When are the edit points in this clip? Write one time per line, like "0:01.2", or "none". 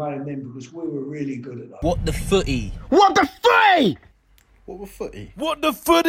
0:01.6